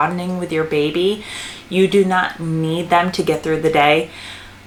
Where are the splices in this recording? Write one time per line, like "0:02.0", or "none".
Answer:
none